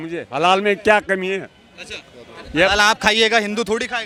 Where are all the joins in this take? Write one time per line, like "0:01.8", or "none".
none